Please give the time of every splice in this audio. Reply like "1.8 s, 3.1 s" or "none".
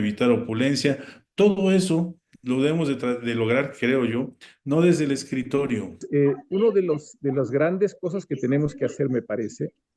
6.0 s